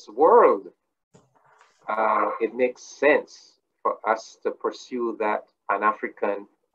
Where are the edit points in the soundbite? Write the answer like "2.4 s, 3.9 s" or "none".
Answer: none